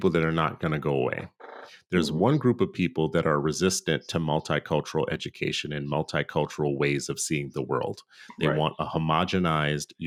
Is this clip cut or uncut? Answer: uncut